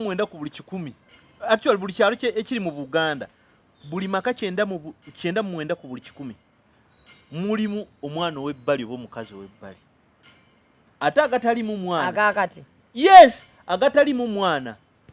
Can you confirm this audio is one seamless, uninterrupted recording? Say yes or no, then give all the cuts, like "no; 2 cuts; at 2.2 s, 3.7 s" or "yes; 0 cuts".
yes; 0 cuts